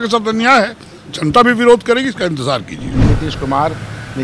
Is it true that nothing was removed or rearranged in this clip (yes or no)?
no